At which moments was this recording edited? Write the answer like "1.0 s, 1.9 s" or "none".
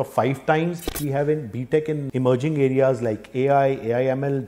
1.0 s, 2.1 s